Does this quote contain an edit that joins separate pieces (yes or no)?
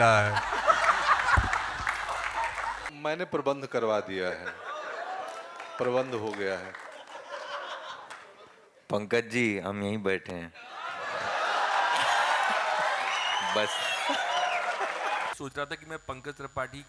yes